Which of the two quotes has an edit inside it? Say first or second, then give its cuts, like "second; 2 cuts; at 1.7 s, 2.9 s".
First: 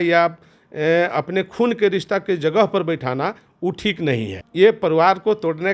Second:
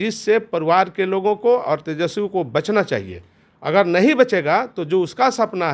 first; 1 cut; at 4.4 s